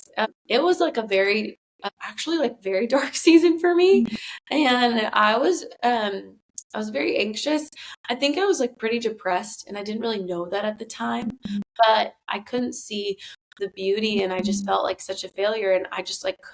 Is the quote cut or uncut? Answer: cut